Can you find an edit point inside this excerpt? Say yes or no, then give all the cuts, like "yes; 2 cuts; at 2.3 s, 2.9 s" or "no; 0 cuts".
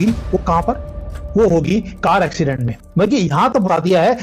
no; 0 cuts